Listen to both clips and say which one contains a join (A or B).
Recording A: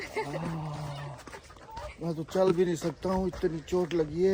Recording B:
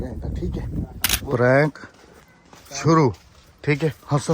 B